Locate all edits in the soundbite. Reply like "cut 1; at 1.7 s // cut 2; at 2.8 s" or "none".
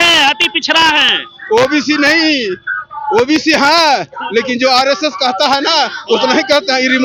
none